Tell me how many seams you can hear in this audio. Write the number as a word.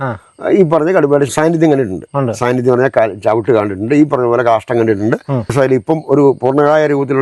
two